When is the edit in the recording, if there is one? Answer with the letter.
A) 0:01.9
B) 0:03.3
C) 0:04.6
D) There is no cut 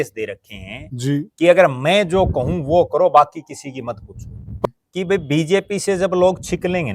C